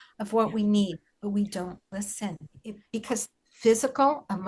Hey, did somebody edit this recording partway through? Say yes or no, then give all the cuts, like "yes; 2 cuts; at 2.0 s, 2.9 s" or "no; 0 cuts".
yes; 1 cut; at 2.8 s